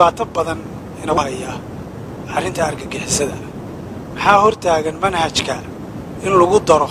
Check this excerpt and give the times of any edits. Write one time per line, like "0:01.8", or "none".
0:01.2